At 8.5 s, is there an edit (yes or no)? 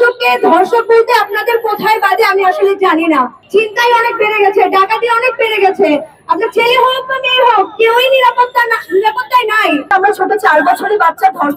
no